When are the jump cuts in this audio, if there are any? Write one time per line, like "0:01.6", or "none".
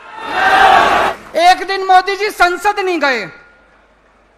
0:01.2